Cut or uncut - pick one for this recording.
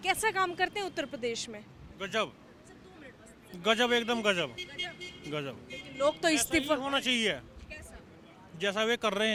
uncut